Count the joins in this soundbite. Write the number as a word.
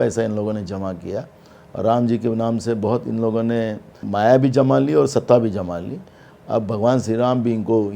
one